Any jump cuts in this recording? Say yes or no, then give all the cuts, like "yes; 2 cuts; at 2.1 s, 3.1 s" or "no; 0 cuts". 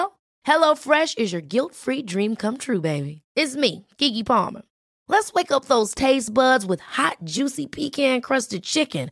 no; 0 cuts